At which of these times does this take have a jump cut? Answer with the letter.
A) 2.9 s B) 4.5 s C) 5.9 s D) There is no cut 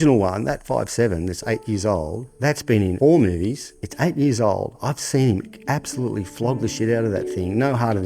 A